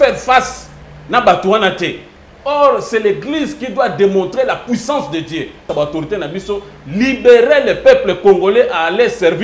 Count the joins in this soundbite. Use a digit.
1